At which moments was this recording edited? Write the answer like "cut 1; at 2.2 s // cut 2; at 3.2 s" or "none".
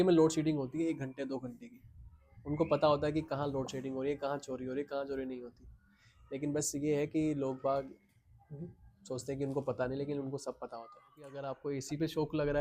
cut 1; at 11.5 s